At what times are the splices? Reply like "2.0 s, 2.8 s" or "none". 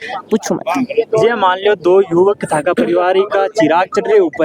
none